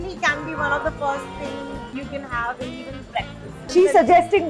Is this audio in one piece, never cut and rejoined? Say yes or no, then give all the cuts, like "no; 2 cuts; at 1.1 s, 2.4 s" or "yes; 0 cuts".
no; 1 cut; at 1.9 s